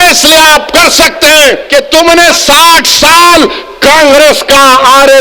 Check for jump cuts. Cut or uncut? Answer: cut